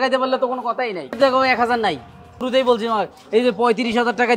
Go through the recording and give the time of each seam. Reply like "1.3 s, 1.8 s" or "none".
1.2 s, 2.3 s